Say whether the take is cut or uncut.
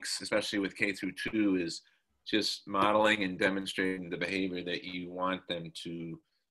uncut